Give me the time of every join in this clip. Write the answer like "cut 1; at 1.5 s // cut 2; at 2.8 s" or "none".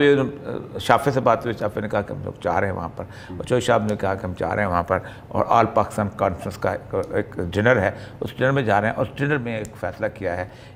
none